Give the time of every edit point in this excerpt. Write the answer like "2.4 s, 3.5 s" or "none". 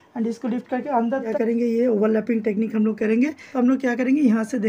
1.3 s, 3.4 s